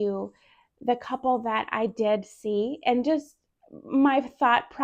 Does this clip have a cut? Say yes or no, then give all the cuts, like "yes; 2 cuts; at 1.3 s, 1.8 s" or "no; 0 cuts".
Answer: no; 0 cuts